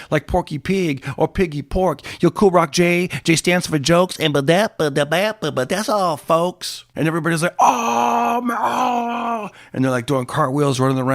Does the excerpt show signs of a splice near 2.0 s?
no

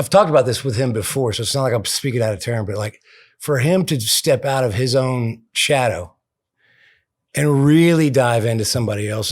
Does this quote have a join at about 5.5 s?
yes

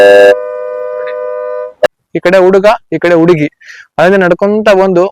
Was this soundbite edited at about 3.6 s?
no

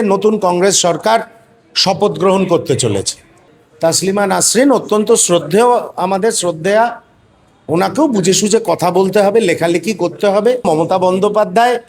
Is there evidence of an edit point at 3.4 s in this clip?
yes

